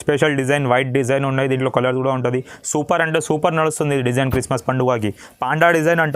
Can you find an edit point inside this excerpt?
no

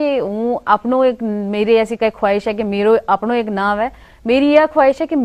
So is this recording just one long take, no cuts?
yes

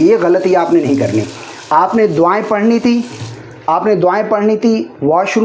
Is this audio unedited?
yes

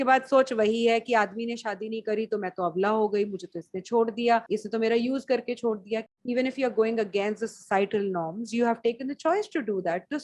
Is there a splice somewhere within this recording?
yes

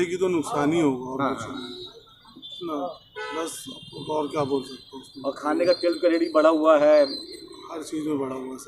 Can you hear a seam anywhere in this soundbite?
no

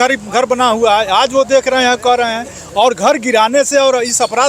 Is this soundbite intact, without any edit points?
yes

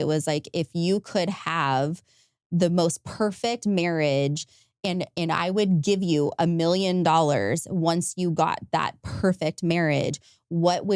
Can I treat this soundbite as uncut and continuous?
yes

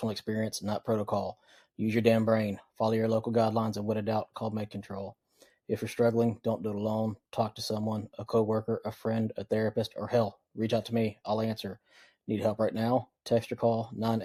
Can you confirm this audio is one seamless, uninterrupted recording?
yes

